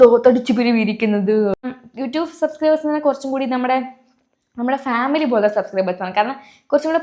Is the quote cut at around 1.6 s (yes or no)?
yes